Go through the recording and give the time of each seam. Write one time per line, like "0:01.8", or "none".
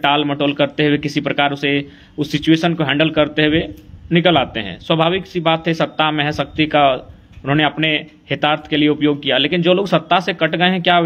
none